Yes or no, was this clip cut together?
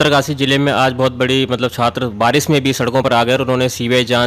no